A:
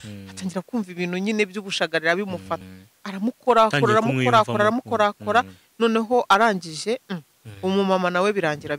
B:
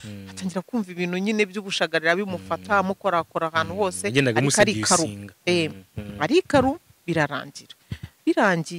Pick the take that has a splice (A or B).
A